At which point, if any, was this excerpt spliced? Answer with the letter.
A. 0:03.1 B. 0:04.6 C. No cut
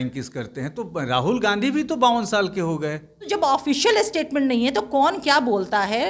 A